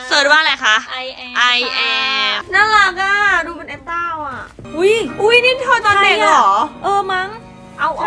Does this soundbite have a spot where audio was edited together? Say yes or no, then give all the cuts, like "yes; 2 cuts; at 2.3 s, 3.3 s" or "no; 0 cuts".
yes; 2 cuts; at 2.4 s, 4.6 s